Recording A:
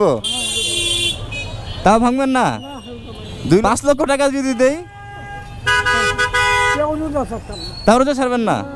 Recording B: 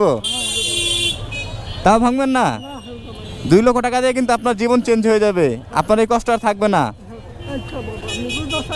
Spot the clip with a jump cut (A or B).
A